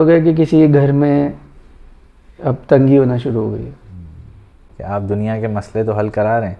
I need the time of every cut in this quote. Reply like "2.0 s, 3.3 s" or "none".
4.7 s